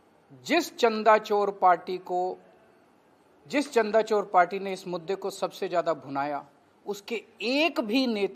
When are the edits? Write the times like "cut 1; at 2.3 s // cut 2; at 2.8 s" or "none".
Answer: none